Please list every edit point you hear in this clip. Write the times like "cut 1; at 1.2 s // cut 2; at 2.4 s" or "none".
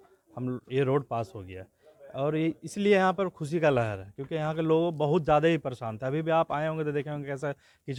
none